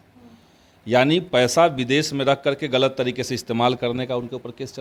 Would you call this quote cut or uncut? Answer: uncut